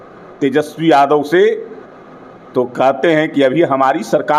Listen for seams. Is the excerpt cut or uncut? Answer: uncut